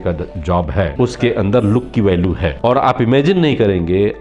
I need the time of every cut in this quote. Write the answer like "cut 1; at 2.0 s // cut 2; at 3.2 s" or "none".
cut 1; at 0.9 s // cut 2; at 2.6 s